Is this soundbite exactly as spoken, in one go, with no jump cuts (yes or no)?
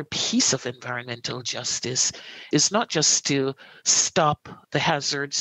no